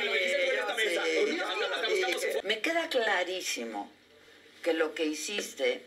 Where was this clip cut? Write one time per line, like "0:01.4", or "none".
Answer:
0:02.4